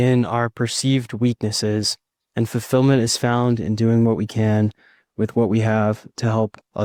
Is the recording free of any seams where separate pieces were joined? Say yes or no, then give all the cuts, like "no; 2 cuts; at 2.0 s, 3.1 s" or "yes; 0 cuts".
yes; 0 cuts